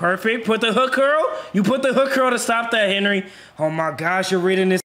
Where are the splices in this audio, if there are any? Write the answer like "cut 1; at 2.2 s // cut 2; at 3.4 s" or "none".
none